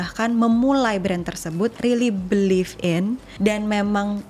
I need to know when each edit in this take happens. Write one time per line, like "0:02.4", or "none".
0:03.3